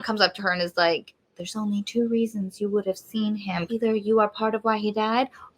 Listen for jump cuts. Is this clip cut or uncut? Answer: cut